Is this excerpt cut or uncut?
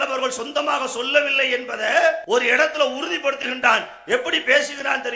cut